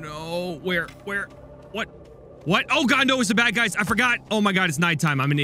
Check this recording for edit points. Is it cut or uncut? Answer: uncut